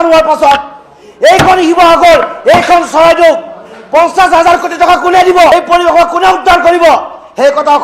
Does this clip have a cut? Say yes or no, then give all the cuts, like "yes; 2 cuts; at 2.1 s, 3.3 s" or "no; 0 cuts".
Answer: no; 0 cuts